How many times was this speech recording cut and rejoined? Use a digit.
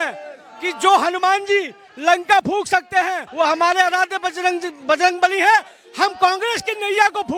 0